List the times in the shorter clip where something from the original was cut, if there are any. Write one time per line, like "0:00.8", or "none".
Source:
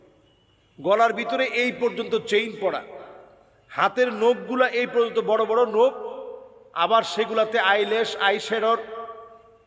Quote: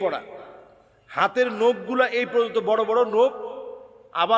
none